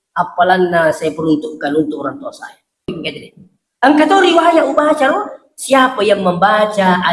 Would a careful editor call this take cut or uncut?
cut